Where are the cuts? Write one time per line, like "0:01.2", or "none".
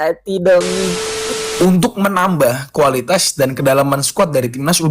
0:01.3